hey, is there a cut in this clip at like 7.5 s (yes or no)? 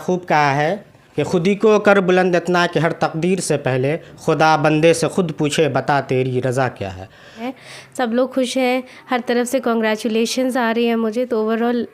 yes